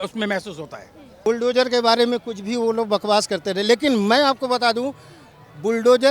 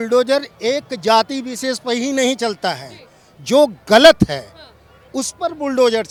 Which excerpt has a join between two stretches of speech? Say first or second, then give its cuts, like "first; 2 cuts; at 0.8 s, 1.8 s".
first; 1 cut; at 1.2 s